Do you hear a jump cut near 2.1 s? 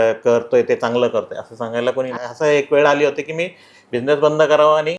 yes; 1 cut; at 2.1 s

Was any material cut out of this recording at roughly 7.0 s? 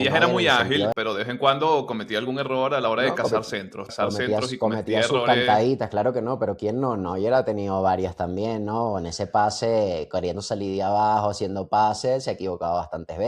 no; 2 cuts; at 0.9 s, 3.9 s

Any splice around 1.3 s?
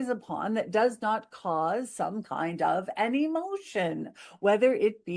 no; 0 cuts

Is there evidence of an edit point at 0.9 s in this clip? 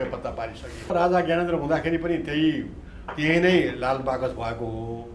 yes; 1 cut; at 0.9 s

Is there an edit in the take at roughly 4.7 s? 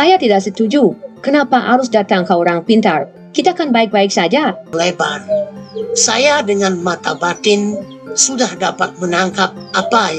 yes; 1 cut; at 4.7 s

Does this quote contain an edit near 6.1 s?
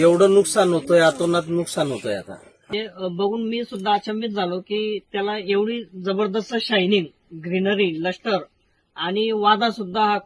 no; 1 cut; at 2.7 s

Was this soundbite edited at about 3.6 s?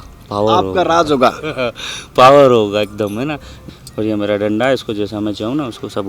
yes; 1 cut; at 3.6 s

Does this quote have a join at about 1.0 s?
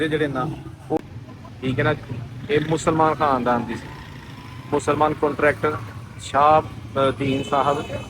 yes; 1 cut; at 1.0 s

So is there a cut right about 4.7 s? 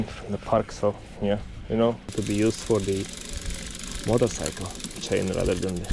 no; 1 cut; at 2.1 s

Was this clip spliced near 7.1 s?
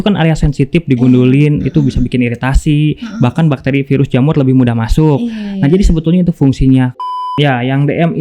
yes; 1 cut; at 7.1 s

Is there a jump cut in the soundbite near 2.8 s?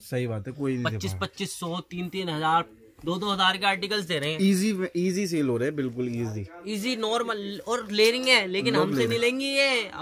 no; 0 cuts

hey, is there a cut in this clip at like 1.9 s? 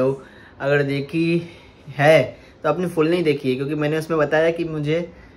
no; 0 cuts

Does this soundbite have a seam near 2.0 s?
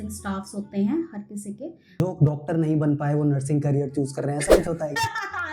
yes; 1 cut; at 2.0 s

